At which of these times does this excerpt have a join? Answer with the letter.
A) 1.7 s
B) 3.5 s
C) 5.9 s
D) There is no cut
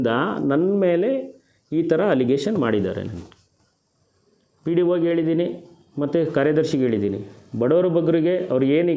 D